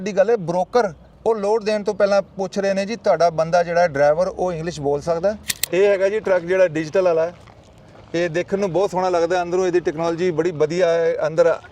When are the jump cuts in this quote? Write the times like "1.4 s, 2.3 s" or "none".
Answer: 1.1 s, 5.5 s